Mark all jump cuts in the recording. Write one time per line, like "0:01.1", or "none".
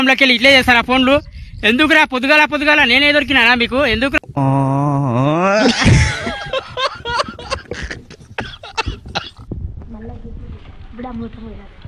0:04.2
0:09.5